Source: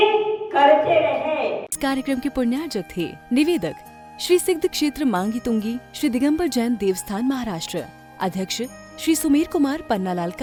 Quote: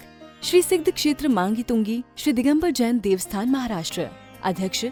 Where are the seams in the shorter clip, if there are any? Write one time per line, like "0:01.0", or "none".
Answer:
none

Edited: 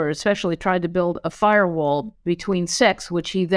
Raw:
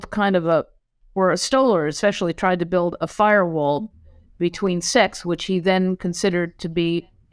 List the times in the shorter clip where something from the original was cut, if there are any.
0:02.1

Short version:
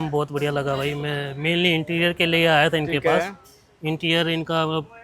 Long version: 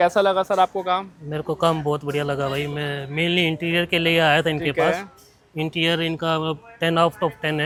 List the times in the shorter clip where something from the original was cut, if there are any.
none

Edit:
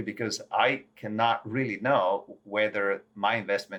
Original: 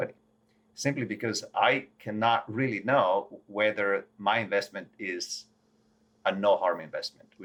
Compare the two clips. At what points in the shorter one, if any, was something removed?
none

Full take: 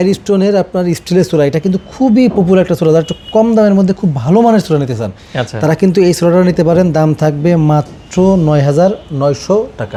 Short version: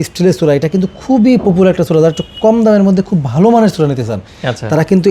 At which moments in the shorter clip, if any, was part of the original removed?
none

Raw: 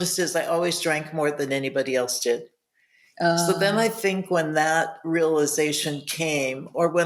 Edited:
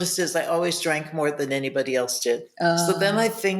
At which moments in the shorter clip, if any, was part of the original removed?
0:02.5

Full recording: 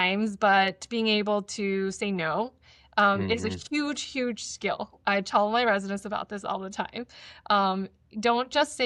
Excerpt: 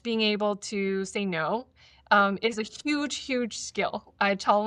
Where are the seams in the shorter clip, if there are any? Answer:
none

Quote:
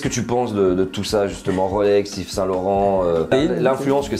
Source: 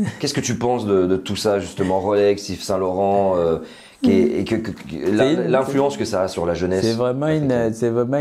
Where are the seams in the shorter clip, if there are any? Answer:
0:03.3

